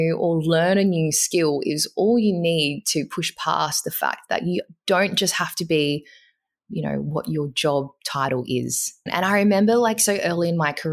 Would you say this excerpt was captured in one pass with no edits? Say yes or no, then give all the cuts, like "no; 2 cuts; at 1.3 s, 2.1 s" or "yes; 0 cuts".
no; 1 cut; at 9.1 s